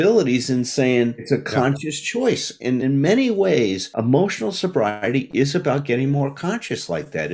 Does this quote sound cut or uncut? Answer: cut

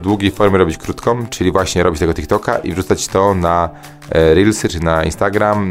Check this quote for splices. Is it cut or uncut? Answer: cut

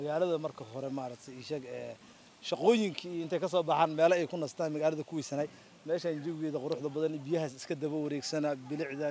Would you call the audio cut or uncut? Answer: uncut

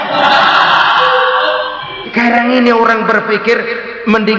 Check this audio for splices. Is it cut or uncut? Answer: cut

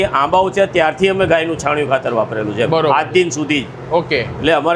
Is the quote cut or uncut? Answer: uncut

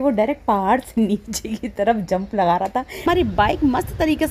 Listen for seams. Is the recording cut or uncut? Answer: cut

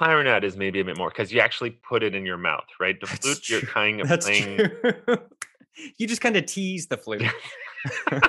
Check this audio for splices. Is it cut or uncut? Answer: cut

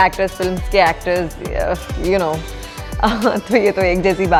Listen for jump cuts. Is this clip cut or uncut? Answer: uncut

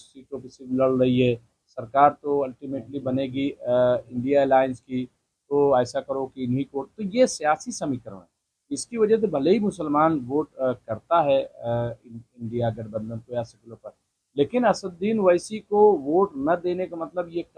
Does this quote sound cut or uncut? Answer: uncut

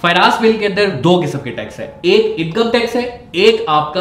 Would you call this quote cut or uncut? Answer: uncut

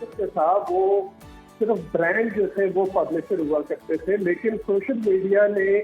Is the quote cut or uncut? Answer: uncut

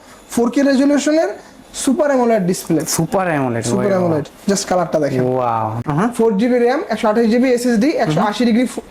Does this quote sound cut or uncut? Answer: cut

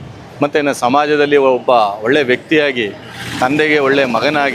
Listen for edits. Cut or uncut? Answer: uncut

